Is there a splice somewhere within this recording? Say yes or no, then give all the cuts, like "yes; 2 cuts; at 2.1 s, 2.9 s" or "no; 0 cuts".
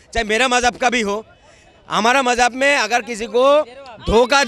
no; 0 cuts